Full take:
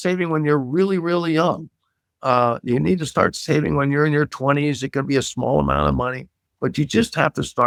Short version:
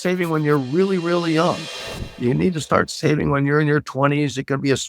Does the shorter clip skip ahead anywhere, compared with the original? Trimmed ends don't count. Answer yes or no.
yes